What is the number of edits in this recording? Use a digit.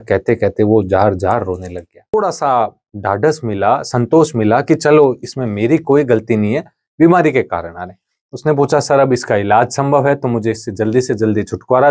1